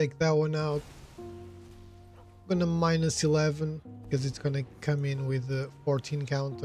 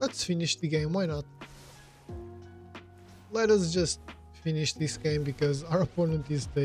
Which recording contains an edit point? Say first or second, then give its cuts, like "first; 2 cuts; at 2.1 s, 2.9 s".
second; 2 cuts; at 1.5 s, 3.2 s